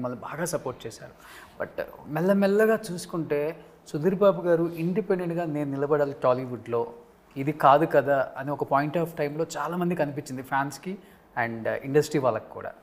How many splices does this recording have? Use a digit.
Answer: 0